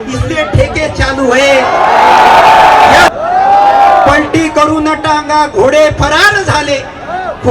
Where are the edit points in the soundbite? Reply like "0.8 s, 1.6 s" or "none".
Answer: 3.1 s